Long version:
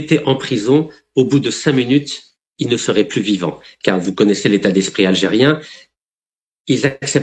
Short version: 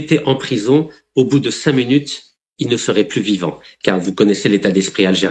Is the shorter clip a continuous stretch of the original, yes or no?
yes